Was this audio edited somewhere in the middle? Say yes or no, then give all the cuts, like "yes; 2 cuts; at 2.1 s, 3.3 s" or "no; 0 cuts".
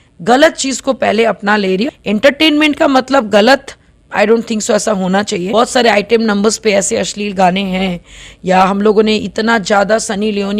yes; 2 cuts; at 1.9 s, 5.5 s